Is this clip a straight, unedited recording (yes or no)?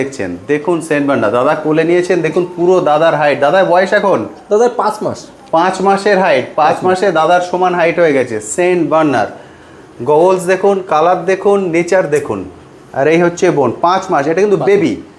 yes